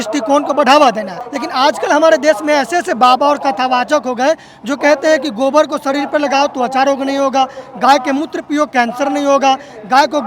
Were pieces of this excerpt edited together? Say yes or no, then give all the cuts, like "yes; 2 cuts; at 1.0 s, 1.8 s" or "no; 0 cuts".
no; 0 cuts